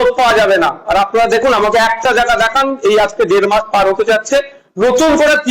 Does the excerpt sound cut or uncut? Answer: uncut